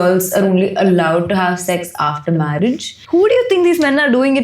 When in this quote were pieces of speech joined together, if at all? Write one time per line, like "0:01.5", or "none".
0:02.9